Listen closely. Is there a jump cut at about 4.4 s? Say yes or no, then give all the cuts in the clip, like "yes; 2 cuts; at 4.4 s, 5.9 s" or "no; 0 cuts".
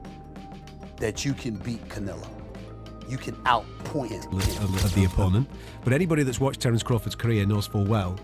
yes; 1 cut; at 4.4 s